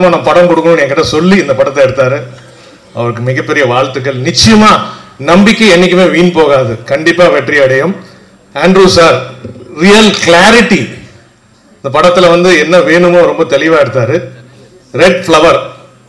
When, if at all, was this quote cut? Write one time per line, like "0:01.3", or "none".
none

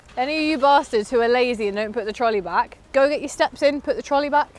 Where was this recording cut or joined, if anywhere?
0:02.8

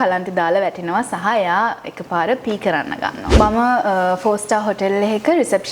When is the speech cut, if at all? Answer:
0:03.3

